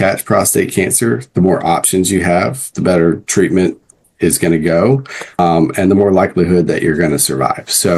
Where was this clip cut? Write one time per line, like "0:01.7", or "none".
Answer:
0:05.4

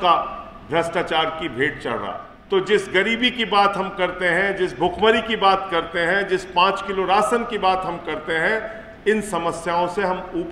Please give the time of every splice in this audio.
0:02.3

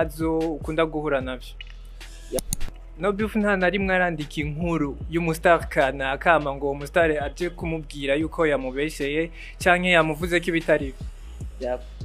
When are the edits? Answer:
0:02.4

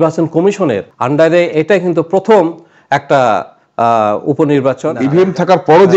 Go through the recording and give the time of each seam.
0:00.9
0:04.9

